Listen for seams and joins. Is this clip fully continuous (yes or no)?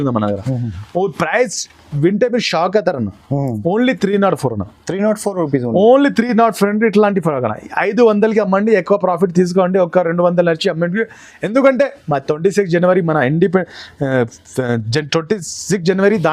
yes